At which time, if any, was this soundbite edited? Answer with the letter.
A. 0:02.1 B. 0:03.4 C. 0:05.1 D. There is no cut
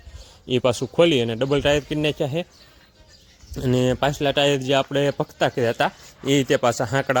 D